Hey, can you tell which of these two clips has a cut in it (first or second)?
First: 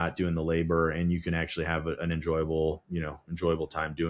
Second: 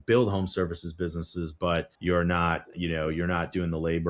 second